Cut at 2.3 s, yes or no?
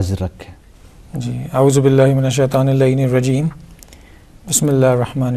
yes